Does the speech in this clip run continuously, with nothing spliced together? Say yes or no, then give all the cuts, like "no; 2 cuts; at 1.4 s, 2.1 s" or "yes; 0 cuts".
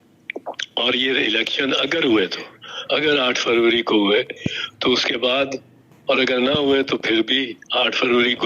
yes; 0 cuts